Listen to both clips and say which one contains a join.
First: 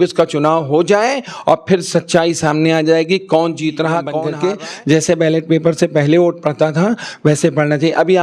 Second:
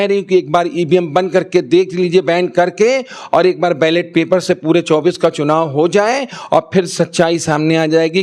first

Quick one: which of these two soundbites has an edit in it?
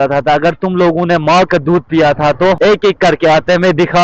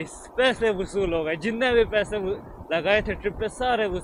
first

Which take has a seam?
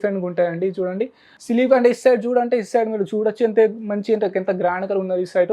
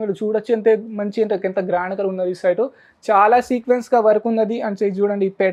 first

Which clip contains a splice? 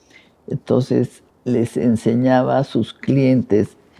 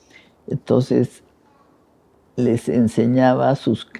first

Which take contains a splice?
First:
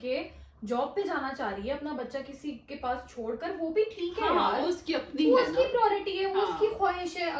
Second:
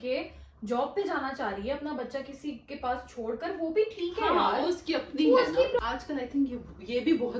second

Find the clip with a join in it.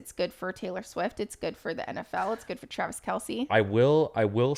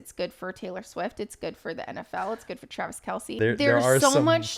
second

